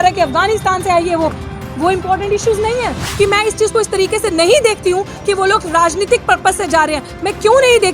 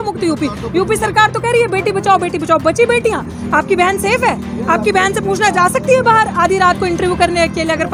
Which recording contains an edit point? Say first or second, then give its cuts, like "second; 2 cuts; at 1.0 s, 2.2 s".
first; 1 cut; at 3.0 s